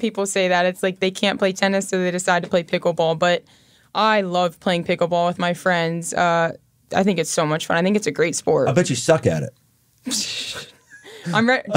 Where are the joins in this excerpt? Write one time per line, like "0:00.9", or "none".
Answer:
0:06.8